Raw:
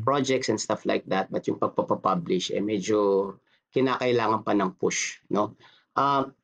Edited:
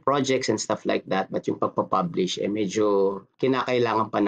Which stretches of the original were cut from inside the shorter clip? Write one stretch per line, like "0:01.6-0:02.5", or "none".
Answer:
0:01.7-0:01.9
0:03.4-0:03.6